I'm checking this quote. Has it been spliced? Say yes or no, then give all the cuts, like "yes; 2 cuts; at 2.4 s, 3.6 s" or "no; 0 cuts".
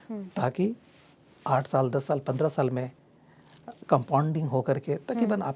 no; 0 cuts